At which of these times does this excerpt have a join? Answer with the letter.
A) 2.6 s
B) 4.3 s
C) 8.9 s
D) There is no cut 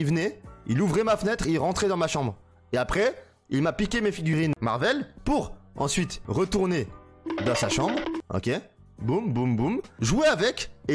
B